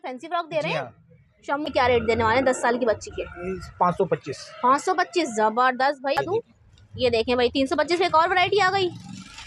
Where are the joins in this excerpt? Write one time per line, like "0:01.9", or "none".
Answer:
0:01.7
0:06.2

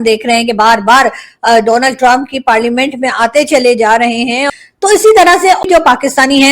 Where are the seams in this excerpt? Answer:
0:04.4
0:05.6

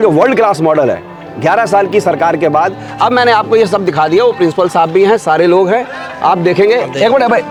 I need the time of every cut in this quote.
none

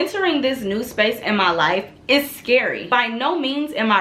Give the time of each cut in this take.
0:02.9

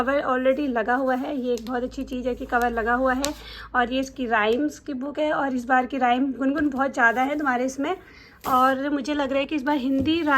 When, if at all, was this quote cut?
none

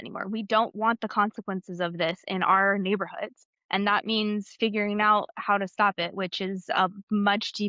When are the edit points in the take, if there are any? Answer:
none

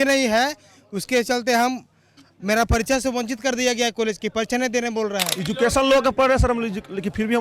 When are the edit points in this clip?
0:05.3

